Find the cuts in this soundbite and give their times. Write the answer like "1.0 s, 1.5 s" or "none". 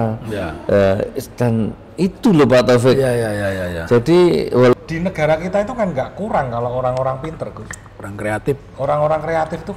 4.7 s